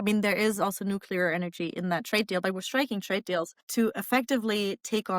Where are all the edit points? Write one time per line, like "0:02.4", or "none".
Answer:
0:03.6